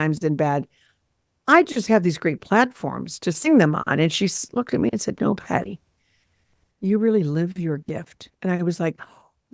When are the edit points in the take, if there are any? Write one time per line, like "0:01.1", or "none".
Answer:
none

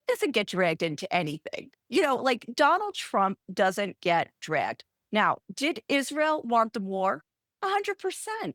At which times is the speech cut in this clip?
none

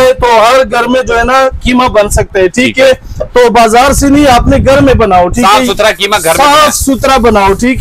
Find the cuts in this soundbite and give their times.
none

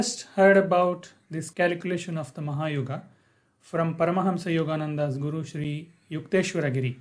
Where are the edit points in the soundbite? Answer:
0:01.4

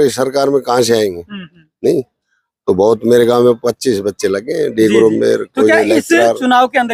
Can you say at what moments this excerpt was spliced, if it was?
none

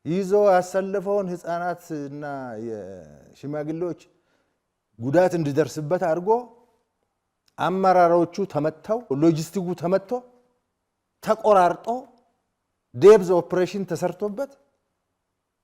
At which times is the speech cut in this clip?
0:09.1

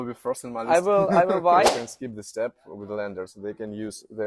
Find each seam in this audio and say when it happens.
0:01.7

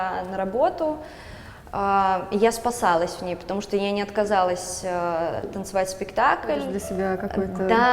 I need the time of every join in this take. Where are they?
0:06.8

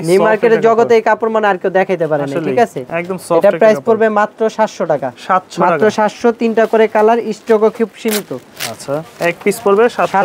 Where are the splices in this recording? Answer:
none

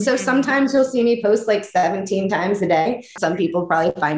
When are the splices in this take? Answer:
0:03.1

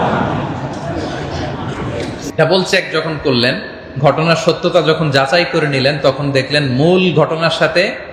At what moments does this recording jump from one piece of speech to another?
0:02.2

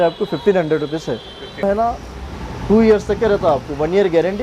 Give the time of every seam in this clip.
0:01.6

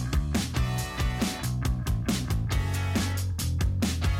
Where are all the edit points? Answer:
0:01.7

